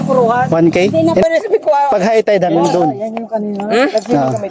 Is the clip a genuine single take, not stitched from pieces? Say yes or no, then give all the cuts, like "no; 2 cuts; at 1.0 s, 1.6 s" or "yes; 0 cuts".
no; 1 cut; at 1.2 s